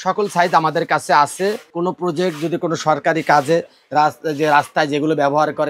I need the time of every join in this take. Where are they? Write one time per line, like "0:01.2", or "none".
0:01.7